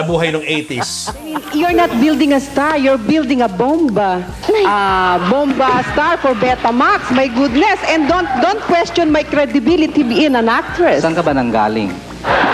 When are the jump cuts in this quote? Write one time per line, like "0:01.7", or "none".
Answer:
0:01.5